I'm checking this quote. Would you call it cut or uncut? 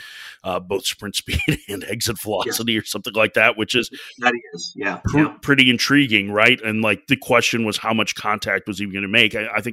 uncut